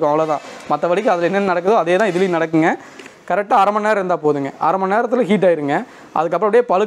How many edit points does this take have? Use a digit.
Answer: 1